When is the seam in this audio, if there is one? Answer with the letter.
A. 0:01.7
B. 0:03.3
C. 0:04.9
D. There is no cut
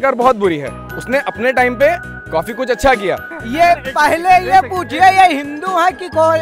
B